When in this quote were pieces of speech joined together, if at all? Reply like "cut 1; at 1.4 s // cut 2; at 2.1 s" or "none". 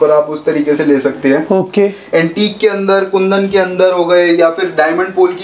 none